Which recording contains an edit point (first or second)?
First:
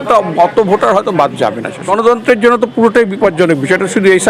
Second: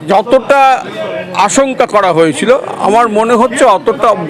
first